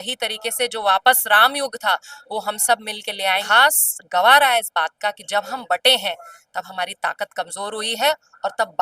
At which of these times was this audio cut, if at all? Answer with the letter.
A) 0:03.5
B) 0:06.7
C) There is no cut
A